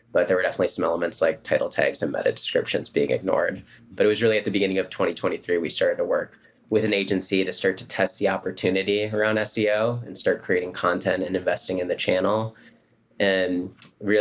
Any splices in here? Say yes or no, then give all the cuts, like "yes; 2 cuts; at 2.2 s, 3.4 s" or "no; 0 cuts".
yes; 1 cut; at 3.9 s